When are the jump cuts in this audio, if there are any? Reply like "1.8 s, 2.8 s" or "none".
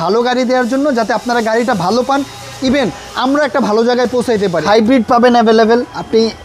4.6 s